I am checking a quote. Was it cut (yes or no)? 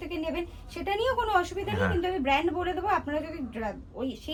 no